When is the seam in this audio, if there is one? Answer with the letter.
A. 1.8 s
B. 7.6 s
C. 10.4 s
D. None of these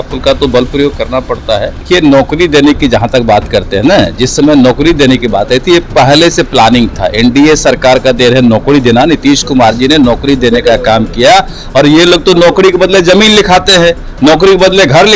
A